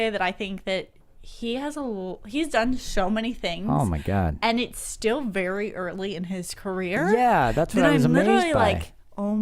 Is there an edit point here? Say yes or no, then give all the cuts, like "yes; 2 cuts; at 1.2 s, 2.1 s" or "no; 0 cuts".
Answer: yes; 1 cut; at 2.9 s